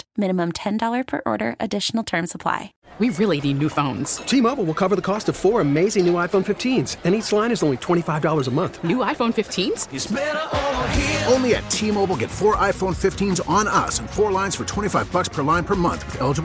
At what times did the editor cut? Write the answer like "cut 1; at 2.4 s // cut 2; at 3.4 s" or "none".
cut 1; at 2.7 s